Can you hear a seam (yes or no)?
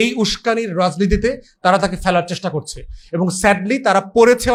no